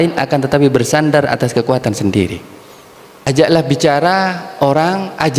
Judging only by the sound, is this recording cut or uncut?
cut